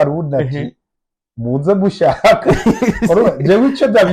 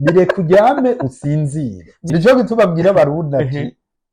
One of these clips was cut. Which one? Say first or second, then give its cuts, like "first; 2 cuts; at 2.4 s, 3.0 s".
second; 1 cut; at 2.1 s